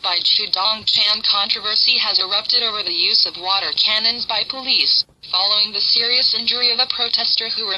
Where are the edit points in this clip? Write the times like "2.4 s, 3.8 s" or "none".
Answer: 5.5 s